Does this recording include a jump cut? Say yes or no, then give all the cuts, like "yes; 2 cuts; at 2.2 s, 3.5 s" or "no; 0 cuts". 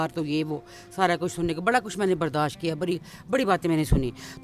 no; 0 cuts